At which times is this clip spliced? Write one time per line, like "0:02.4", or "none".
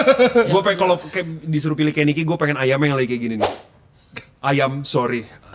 none